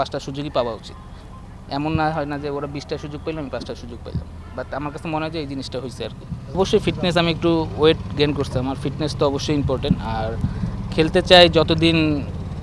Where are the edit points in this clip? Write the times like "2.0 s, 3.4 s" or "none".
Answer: 6.6 s

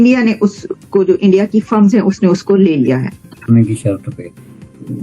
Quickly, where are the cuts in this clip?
3.3 s

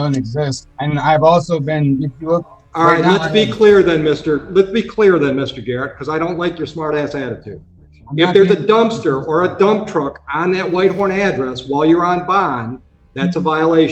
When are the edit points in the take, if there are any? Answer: none

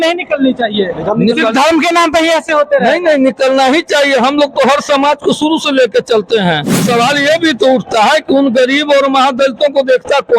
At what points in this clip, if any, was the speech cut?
6.8 s

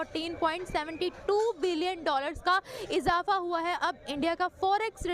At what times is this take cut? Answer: none

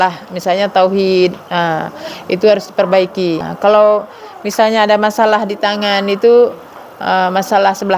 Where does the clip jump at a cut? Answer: 3.5 s

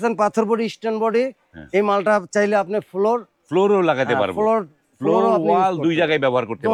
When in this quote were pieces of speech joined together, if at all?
none

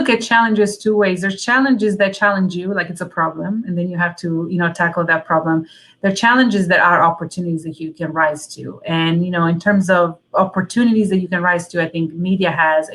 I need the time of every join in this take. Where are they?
none

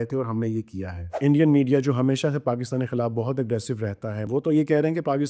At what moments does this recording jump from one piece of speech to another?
1.2 s, 4.2 s

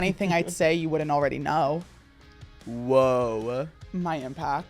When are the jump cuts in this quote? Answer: 3.8 s

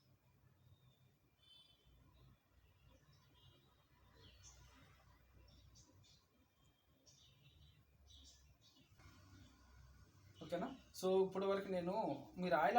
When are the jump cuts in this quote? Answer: 9.0 s

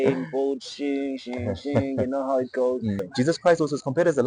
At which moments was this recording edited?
3.1 s

